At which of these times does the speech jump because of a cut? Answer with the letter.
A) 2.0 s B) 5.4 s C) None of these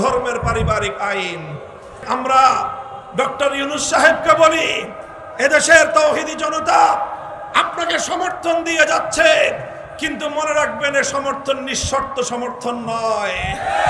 A